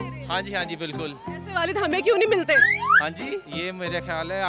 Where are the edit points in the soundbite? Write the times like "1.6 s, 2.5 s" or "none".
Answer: 3.5 s